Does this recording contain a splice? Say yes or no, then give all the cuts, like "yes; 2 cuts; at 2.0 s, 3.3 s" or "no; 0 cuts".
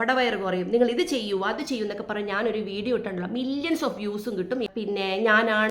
yes; 1 cut; at 4.7 s